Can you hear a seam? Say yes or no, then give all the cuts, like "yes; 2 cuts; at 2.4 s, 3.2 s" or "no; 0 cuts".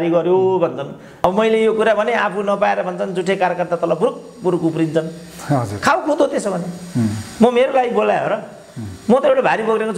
yes; 1 cut; at 1.2 s